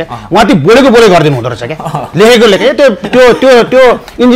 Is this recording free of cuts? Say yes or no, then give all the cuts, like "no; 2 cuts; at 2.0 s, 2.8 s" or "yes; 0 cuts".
yes; 0 cuts